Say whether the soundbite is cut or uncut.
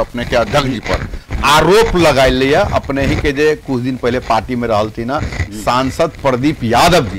uncut